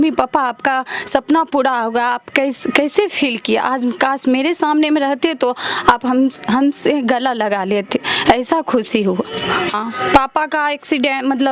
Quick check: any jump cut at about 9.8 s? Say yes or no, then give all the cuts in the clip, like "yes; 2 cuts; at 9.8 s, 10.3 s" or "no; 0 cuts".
yes; 1 cut; at 9.8 s